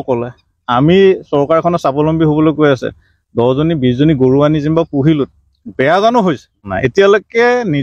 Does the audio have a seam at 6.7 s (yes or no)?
yes